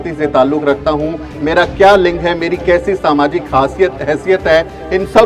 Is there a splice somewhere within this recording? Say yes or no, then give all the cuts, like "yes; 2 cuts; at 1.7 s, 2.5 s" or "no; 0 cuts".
no; 0 cuts